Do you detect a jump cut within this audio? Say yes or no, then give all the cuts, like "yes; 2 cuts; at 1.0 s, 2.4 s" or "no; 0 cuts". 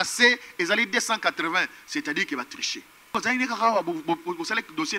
yes; 1 cut; at 3.1 s